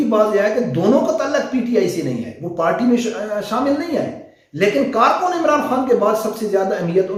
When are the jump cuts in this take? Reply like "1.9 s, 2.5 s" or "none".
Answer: none